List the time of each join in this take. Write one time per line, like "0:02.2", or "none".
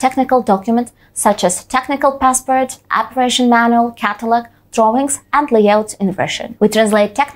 0:06.4